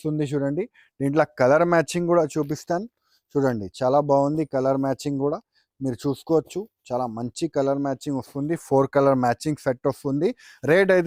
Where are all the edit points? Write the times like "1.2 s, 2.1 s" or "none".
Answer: none